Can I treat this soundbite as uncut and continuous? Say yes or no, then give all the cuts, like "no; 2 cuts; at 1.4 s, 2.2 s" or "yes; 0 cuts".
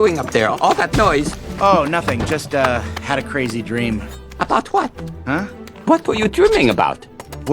no; 1 cut; at 1.4 s